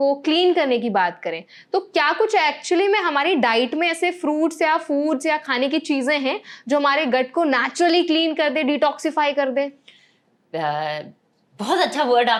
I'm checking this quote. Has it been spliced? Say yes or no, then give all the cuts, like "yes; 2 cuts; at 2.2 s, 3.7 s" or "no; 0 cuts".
no; 0 cuts